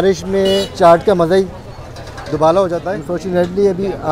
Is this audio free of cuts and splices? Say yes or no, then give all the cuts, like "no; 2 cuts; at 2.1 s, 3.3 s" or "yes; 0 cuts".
no; 1 cut; at 3.0 s